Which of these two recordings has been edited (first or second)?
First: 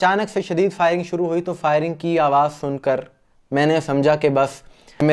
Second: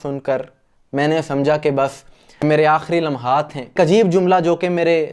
second